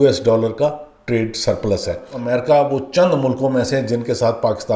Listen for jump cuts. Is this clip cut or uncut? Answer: cut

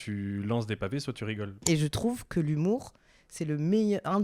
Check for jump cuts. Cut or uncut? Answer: cut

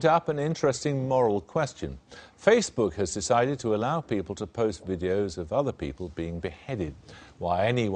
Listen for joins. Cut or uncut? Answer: cut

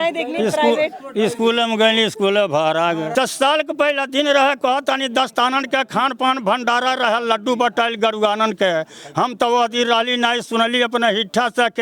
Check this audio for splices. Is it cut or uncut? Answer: cut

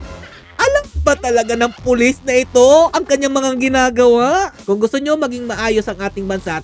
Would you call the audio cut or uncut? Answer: cut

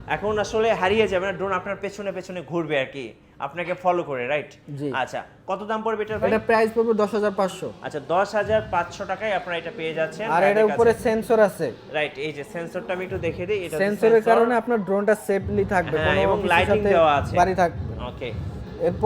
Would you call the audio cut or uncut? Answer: uncut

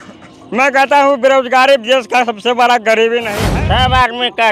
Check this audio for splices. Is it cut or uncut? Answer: cut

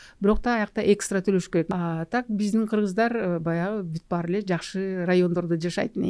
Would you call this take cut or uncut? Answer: cut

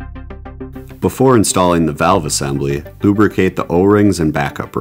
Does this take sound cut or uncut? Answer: cut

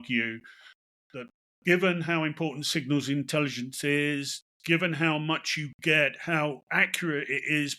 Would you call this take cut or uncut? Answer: uncut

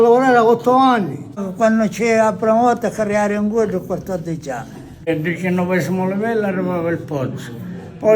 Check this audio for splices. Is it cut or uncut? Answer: cut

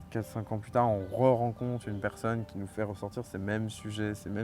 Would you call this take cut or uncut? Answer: uncut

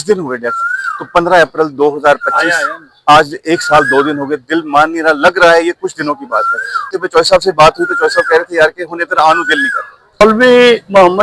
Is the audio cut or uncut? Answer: cut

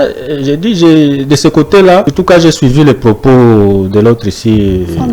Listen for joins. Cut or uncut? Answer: cut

